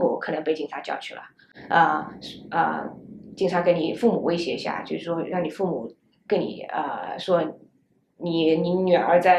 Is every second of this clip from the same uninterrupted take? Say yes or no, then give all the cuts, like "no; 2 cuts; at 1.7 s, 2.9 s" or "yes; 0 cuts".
yes; 0 cuts